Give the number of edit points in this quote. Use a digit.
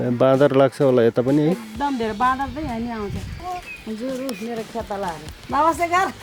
2